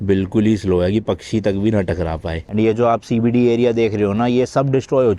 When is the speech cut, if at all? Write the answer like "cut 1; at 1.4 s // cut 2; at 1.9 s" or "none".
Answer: cut 1; at 2.5 s